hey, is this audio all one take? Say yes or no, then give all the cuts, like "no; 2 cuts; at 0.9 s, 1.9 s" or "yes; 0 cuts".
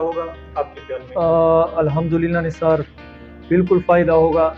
yes; 0 cuts